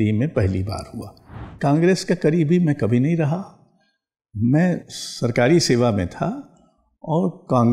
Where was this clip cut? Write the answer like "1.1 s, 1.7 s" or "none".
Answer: 1.5 s